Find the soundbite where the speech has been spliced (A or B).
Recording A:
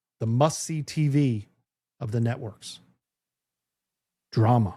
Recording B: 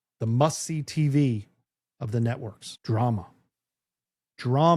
B